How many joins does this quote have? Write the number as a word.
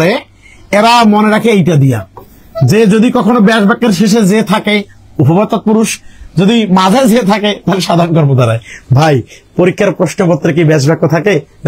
zero